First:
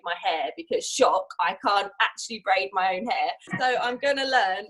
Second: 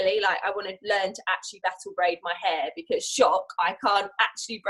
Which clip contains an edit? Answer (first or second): first